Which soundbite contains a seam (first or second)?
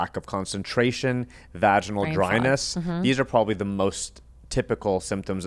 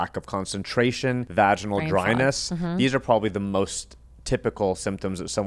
second